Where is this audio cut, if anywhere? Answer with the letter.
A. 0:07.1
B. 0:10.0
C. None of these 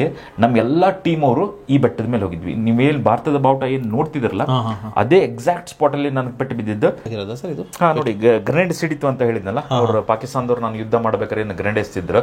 A